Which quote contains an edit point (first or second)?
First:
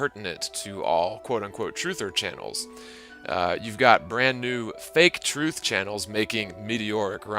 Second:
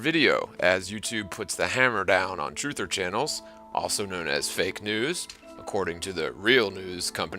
first